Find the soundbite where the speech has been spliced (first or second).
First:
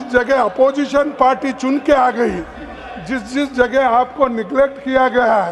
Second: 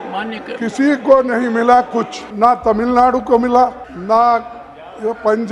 second